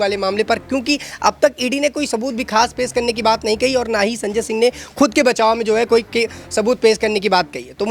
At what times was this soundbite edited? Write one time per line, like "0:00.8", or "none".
none

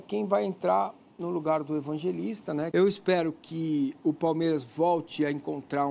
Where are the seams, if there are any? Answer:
0:02.7

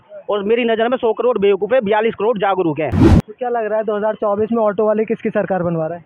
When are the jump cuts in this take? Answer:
0:03.0

